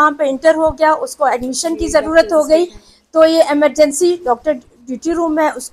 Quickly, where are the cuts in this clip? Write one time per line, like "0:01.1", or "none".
none